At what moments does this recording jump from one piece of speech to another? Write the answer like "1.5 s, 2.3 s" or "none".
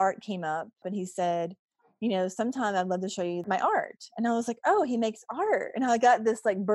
0.8 s, 3.4 s